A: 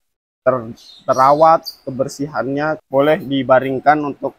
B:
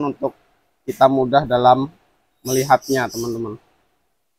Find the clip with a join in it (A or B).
A